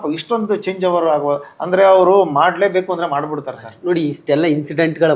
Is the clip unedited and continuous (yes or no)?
yes